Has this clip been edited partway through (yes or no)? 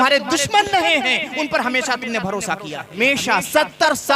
yes